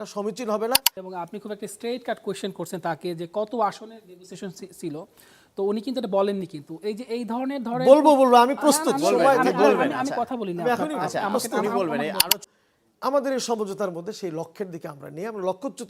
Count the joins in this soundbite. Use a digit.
2